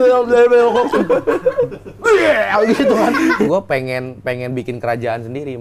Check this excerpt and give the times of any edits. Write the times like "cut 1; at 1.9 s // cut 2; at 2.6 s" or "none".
cut 1; at 3.5 s